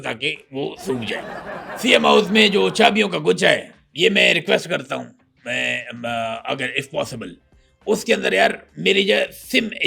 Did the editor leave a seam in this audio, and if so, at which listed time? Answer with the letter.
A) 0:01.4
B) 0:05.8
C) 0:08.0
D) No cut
A